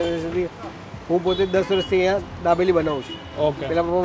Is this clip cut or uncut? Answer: uncut